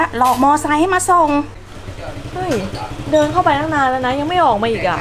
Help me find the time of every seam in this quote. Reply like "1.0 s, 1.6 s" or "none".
1.6 s